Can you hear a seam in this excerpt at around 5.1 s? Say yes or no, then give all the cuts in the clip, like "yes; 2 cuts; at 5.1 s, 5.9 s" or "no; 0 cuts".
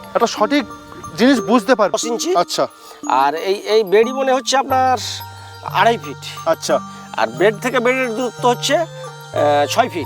no; 1 cut; at 2.0 s